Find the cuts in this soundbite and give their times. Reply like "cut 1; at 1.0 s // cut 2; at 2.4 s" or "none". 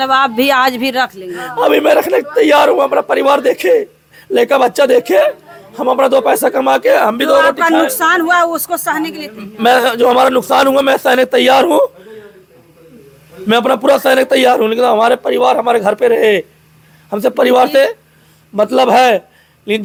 none